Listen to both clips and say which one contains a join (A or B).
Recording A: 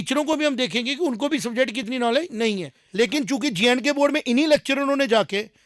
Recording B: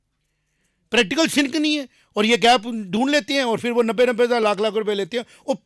A